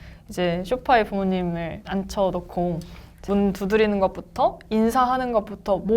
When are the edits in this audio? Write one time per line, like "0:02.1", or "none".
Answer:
0:01.8
0:03.2